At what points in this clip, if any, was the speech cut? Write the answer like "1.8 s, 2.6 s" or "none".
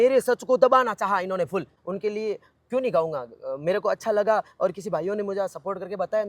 1.8 s